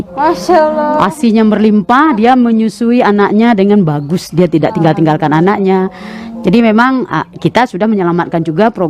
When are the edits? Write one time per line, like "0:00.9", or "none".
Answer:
none